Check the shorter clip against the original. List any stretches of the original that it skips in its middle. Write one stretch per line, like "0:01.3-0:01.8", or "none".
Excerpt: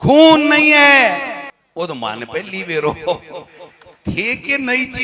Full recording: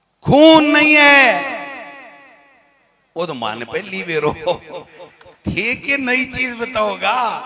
0:01.8-0:03.0